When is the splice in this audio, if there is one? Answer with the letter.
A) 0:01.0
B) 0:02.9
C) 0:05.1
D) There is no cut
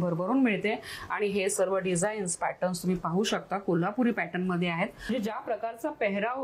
C